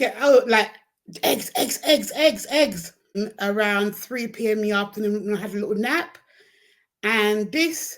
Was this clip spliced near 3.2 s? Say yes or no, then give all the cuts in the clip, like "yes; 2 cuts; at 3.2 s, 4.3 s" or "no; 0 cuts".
yes; 1 cut; at 3.2 s